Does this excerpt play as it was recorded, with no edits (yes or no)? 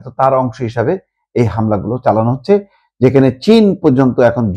yes